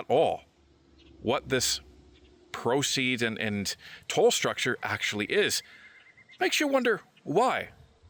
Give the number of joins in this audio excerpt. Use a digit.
0